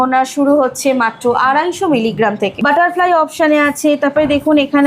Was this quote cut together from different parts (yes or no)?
yes